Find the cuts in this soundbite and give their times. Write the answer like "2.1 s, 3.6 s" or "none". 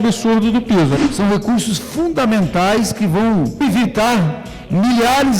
1.0 s, 3.6 s